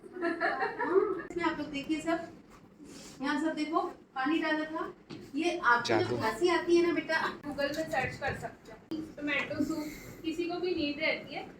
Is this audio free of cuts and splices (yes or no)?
no